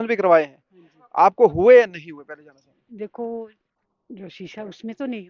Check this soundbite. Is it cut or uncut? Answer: uncut